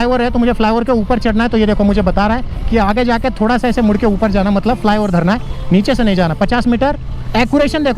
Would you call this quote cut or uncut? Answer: uncut